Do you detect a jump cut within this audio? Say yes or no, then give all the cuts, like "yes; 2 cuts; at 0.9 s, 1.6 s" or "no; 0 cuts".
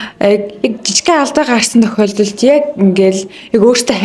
no; 0 cuts